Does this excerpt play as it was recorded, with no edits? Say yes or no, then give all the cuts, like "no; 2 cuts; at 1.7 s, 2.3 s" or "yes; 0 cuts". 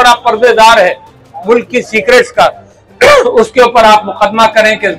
yes; 0 cuts